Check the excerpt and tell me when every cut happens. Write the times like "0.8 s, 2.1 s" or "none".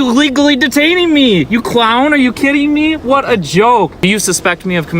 4.0 s